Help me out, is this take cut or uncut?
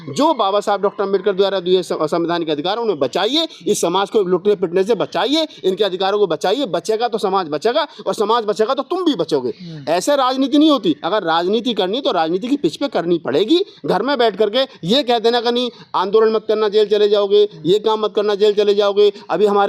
uncut